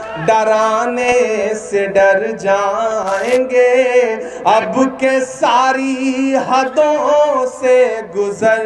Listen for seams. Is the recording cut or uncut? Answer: uncut